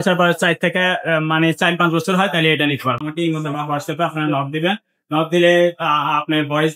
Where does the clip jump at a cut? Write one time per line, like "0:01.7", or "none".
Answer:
0:03.0